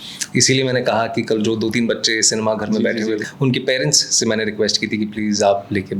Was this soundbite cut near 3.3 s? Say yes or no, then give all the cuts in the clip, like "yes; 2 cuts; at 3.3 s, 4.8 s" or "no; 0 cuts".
yes; 1 cut; at 3.3 s